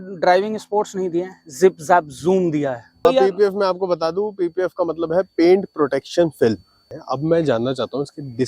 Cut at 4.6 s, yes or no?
no